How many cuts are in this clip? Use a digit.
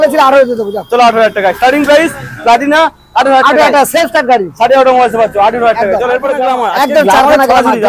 0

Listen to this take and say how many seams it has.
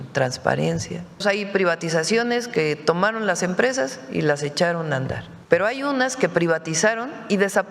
2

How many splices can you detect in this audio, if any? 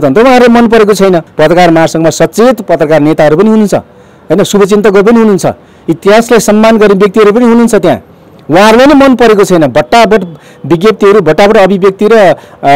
1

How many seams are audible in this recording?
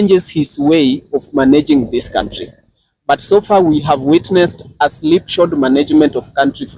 0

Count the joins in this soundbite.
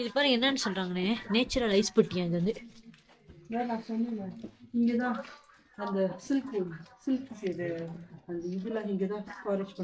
0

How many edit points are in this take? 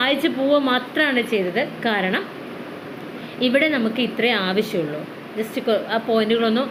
0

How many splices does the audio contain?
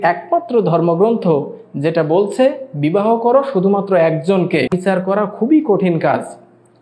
1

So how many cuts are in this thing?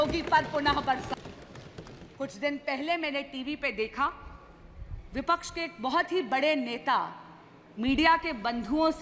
1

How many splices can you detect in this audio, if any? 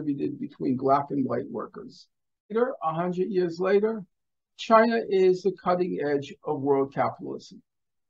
1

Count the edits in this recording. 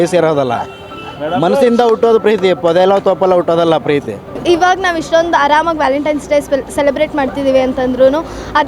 1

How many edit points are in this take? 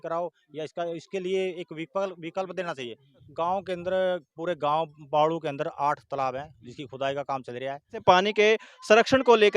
2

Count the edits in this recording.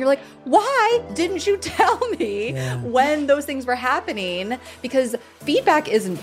1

